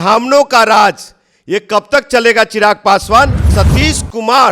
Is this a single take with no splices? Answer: no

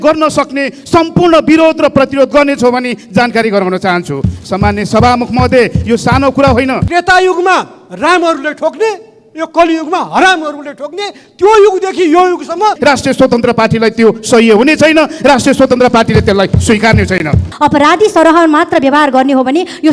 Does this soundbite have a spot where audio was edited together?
yes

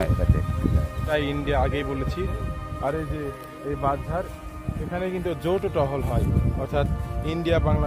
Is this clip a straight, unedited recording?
no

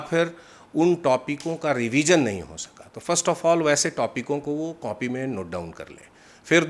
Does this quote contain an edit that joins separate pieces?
no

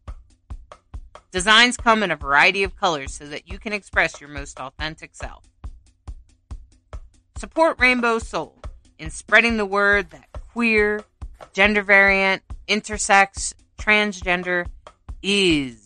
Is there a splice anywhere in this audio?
yes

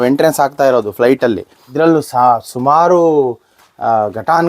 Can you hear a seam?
yes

